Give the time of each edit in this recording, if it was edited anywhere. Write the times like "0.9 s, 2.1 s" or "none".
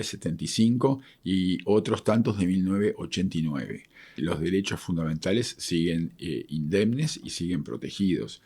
4.2 s